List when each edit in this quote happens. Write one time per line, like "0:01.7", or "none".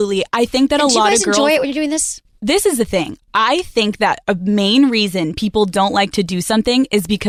none